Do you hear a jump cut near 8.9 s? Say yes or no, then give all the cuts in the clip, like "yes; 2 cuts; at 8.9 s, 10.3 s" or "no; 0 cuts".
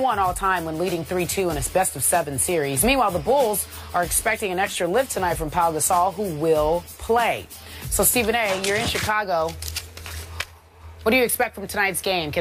yes; 1 cut; at 8.9 s